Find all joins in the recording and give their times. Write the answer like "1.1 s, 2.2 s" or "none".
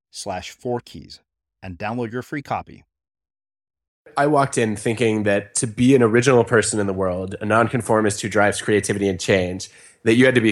4.1 s